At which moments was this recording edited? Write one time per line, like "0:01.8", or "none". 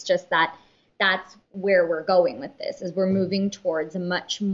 0:01.0